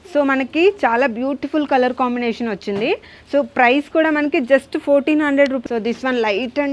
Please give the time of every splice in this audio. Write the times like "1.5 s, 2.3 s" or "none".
5.6 s